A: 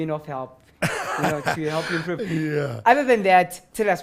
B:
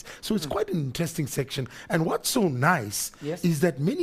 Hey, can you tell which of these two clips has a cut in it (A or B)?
A